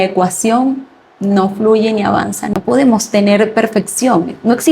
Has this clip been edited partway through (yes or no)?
yes